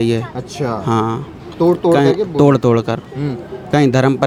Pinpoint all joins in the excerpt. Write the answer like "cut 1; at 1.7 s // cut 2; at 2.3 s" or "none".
none